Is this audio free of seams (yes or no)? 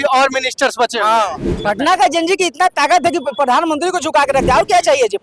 no